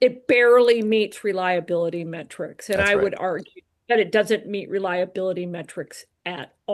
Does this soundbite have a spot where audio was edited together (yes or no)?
no